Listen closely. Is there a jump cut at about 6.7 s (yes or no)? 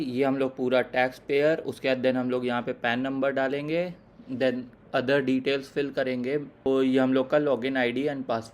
yes